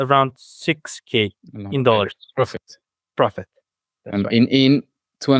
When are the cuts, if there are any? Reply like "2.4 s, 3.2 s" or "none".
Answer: none